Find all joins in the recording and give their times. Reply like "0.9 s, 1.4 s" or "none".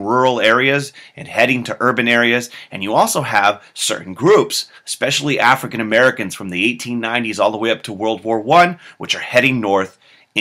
none